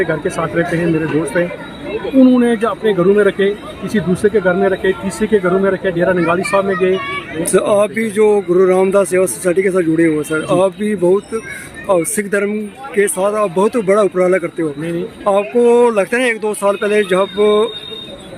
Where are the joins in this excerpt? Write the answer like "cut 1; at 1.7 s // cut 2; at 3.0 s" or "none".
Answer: cut 1; at 7.3 s